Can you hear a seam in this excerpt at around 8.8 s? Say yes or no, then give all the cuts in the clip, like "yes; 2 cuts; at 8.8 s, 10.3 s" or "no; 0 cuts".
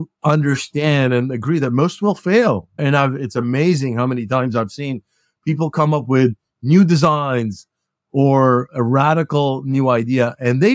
no; 1 cut; at 2.7 s